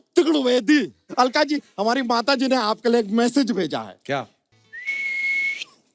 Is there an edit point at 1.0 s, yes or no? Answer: yes